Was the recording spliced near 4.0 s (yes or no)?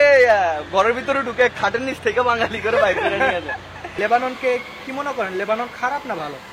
yes